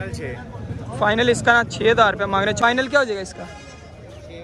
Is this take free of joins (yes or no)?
no